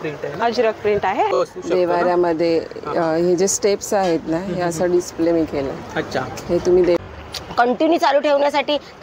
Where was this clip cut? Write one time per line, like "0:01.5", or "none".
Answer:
0:01.3
0:07.0